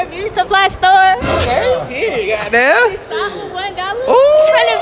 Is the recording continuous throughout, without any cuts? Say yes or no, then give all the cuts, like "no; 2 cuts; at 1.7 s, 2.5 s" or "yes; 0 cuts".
yes; 0 cuts